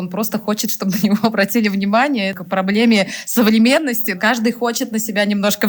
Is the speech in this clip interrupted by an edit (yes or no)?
no